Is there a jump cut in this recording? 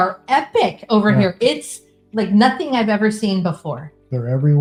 no; 0 cuts

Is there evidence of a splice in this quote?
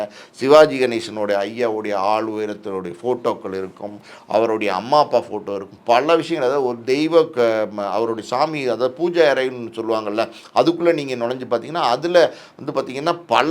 no; 0 cuts

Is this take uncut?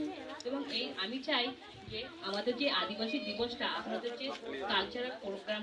yes; 0 cuts

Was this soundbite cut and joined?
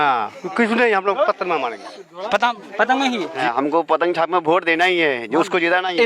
yes; 1 cut; at 3.4 s

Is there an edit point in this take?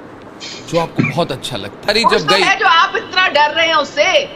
yes; 1 cut; at 1.7 s

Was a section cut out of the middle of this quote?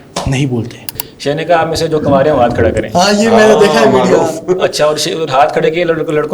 yes; 1 cut; at 1.1 s

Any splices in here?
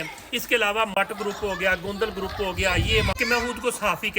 yes; 2 cuts; at 0.9 s, 3.1 s

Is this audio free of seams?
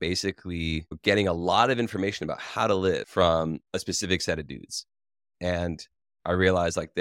no; 1 cut; at 0.9 s

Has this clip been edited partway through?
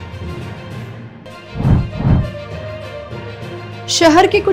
no; 0 cuts

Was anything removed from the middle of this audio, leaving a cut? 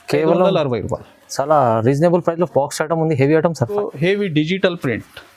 yes; 1 cut; at 3.8 s

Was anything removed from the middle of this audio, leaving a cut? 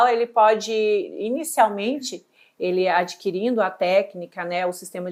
no; 0 cuts

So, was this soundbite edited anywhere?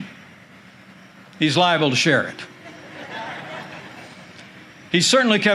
no; 0 cuts

